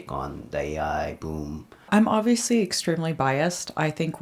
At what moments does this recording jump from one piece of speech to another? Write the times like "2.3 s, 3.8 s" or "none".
1.7 s